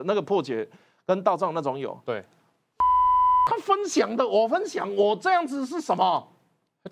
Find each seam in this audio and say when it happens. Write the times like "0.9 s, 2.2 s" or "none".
none

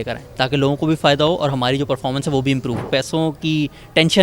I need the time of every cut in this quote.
2.9 s

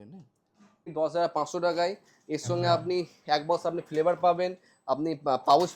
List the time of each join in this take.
0.9 s

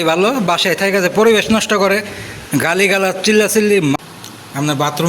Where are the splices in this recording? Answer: 4.0 s

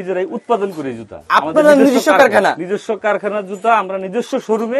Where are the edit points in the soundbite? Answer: none

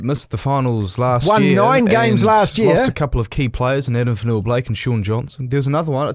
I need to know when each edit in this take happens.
none

